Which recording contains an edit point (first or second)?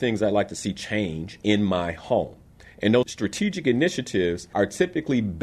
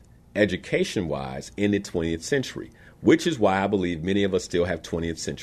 first